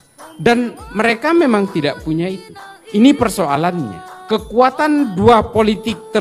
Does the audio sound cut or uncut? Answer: uncut